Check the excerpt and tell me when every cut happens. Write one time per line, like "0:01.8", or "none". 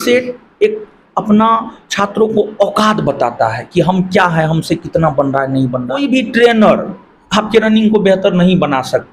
0:05.9

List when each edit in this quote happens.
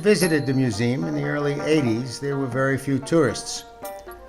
0:01.1

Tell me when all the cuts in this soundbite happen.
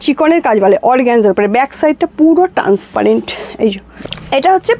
0:03.9

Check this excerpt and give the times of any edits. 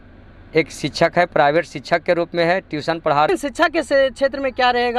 0:03.3

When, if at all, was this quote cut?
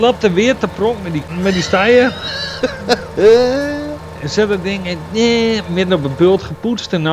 0:01.3

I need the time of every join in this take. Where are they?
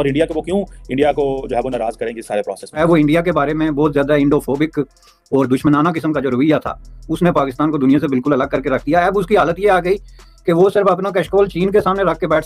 0:02.8

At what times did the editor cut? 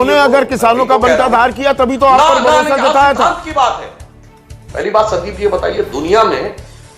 0:04.1

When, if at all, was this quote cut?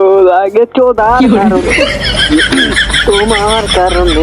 none

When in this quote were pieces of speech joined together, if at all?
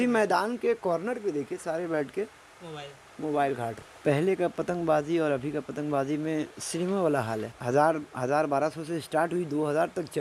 0:03.9
0:07.5

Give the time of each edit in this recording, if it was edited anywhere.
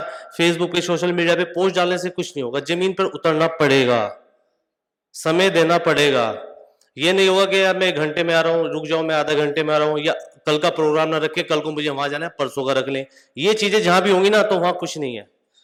none

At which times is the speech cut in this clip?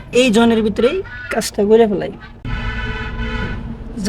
0:02.5

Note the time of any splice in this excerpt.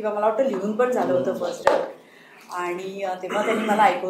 none

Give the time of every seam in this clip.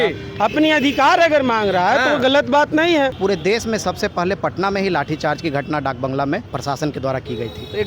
0:03.2
0:06.5

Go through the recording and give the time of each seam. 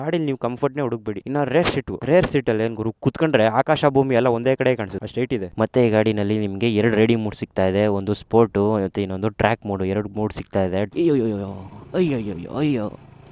0:05.5
0:10.9

